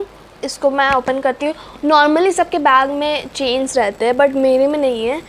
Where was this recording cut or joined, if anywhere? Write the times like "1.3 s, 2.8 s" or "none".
none